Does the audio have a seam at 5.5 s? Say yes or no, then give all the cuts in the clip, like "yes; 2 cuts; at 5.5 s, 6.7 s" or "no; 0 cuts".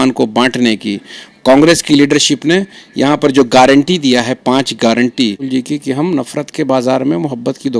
yes; 1 cut; at 5.5 s